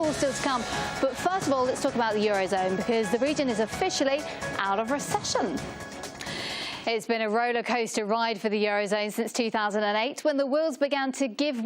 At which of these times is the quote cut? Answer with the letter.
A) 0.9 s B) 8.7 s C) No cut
B